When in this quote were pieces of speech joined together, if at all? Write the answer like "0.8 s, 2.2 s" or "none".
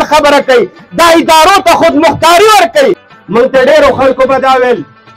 3.1 s